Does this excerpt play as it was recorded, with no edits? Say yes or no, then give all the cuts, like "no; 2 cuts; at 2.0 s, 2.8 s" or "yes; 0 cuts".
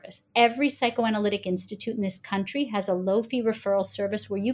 yes; 0 cuts